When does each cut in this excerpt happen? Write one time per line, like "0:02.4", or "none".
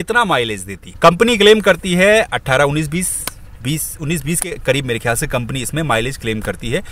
none